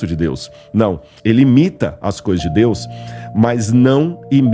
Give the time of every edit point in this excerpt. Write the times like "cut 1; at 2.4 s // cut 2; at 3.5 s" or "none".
cut 1; at 1.1 s